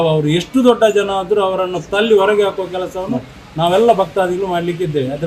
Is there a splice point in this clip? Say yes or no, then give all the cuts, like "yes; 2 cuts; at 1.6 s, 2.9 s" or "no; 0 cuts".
no; 0 cuts